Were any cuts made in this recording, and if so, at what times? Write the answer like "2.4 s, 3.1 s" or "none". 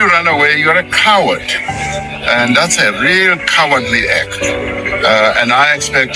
none